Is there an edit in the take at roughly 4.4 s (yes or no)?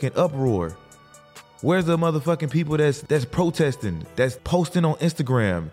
yes